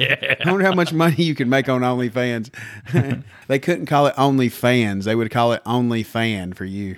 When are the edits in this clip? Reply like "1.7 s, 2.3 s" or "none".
3.4 s